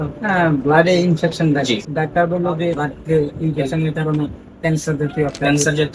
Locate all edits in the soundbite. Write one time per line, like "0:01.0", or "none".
0:01.9
0:02.8

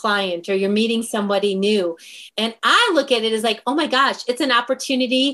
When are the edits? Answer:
0:02.2

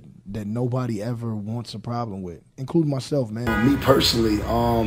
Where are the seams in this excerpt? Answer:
0:03.5

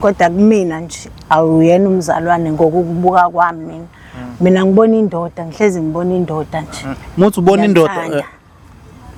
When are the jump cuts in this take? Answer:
none

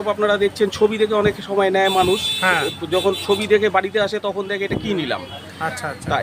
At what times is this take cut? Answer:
none

